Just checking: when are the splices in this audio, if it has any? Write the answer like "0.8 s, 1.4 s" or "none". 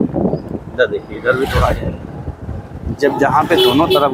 none